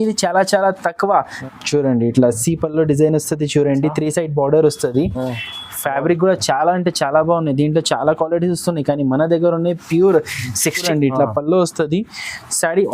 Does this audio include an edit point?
yes; 2 cuts; at 1.4 s, 10.9 s

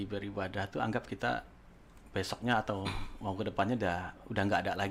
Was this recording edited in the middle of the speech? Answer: no; 0 cuts

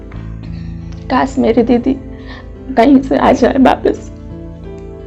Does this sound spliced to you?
yes; 2 cuts; at 1.1 s, 4.0 s

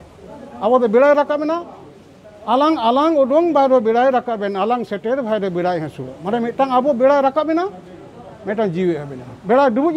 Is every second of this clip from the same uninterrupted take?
yes; 0 cuts

